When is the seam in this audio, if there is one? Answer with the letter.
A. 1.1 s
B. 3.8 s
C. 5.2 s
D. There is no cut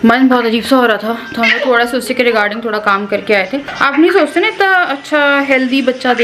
B